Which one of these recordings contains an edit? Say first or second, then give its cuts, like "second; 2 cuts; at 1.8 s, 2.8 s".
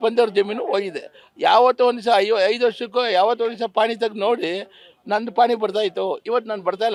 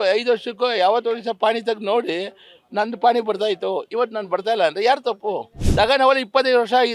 second; 1 cut; at 5.6 s